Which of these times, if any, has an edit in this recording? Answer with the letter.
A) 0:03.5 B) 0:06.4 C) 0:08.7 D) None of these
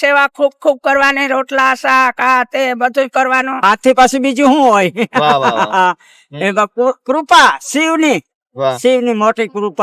A